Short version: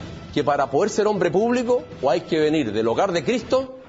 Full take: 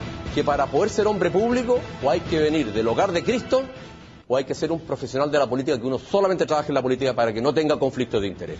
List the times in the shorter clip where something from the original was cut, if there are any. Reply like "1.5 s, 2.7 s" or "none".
none